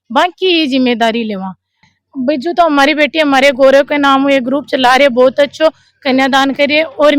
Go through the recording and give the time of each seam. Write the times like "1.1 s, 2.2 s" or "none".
1.8 s